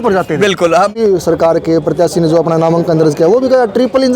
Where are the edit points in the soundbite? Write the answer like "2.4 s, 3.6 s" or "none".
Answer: 0.9 s